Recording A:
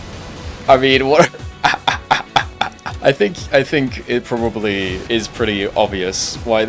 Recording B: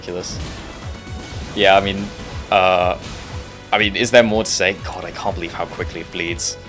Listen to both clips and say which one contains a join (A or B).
A